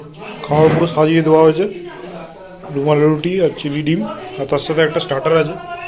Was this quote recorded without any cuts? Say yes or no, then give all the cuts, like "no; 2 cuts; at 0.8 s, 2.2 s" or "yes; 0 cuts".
yes; 0 cuts